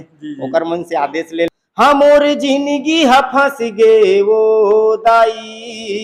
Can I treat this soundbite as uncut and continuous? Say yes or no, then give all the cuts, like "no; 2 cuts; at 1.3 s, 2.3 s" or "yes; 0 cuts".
no; 1 cut; at 1.5 s